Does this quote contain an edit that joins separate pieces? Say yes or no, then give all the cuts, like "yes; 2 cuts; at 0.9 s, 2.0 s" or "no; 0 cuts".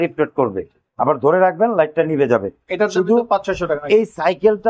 no; 0 cuts